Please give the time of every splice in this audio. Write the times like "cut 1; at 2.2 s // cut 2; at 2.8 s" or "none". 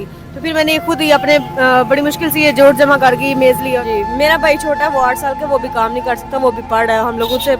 cut 1; at 3.8 s